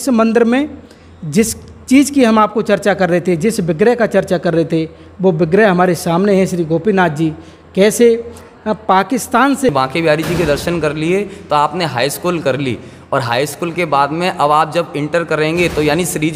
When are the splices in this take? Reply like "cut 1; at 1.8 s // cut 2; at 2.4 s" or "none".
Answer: cut 1; at 9.7 s